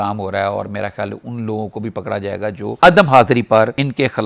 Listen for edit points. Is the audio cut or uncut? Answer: cut